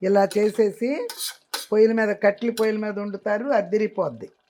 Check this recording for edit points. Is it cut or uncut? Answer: uncut